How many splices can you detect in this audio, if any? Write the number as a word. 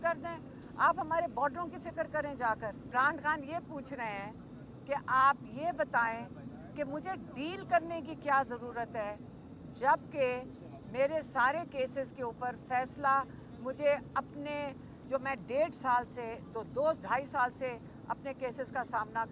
one